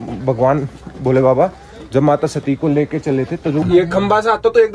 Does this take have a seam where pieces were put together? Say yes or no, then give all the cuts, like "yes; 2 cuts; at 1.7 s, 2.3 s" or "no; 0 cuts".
yes; 1 cut; at 3.6 s